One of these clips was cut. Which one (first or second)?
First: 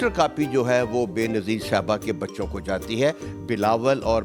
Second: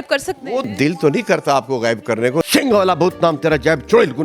second